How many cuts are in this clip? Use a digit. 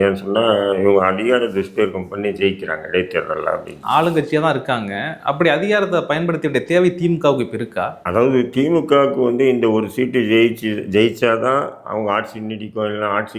1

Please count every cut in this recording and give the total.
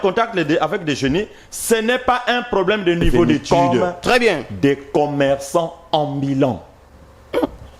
1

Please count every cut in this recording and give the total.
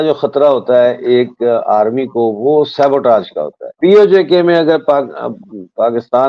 1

